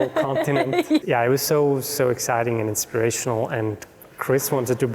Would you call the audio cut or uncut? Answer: cut